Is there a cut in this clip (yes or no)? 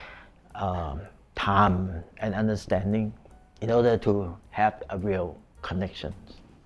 no